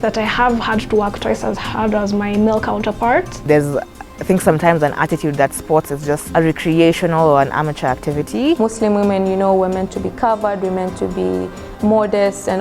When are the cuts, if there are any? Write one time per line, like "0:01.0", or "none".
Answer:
0:03.4
0:06.2
0:08.6

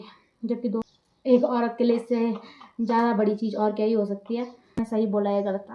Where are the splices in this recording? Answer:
0:00.9
0:04.8

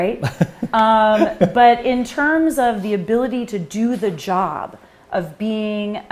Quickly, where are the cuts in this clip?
none

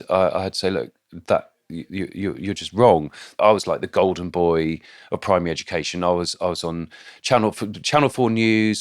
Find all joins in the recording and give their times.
0:03.3

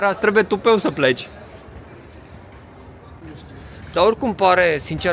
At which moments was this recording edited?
none

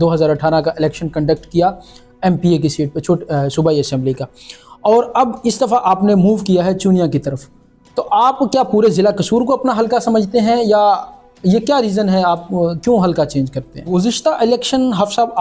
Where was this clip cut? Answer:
0:13.9

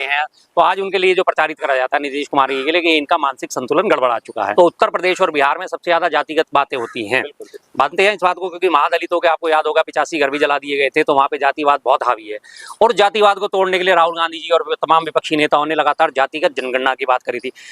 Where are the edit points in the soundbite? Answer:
0:04.5

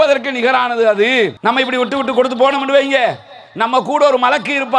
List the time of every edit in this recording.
0:01.3

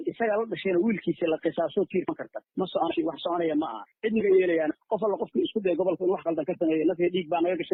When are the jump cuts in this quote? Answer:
none

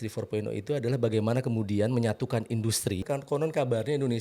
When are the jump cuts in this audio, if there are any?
0:03.0

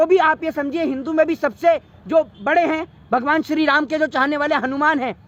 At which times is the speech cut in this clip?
none

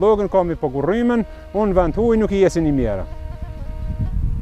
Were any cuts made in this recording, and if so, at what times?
none

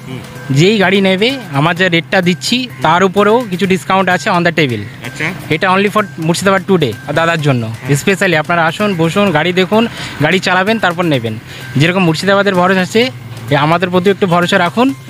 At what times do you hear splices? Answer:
none

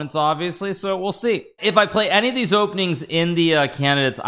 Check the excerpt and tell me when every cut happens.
0:01.6

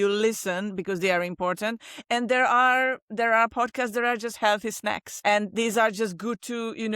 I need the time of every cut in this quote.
0:05.1

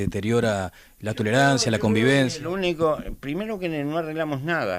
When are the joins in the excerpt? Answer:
0:02.4

